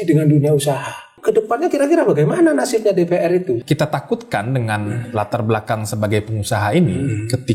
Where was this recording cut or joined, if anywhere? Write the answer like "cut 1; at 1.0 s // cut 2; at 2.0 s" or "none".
cut 1; at 1.1 s // cut 2; at 3.6 s